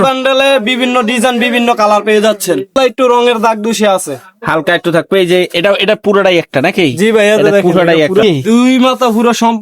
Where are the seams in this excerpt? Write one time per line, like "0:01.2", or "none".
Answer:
0:02.7
0:08.2